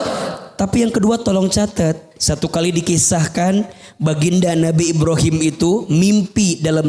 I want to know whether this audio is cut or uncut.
cut